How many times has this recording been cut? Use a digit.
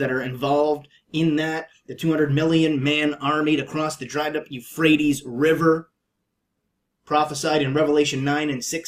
1